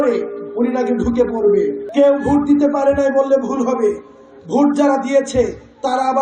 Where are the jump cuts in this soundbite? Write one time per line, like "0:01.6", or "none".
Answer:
0:01.8